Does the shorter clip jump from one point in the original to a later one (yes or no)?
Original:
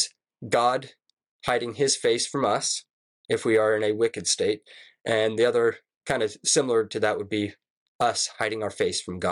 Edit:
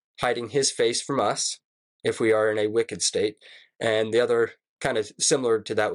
no